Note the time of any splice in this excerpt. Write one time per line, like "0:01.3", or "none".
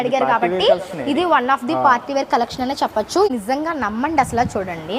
0:03.3